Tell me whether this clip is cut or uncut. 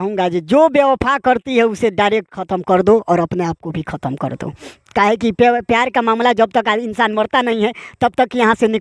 uncut